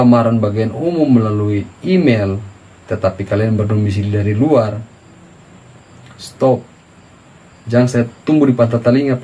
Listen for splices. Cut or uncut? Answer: uncut